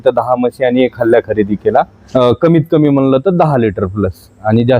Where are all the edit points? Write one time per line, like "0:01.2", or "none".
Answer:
0:02.0